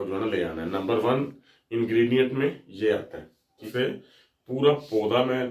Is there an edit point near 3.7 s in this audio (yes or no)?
yes